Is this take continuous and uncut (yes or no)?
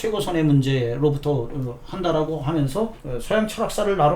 no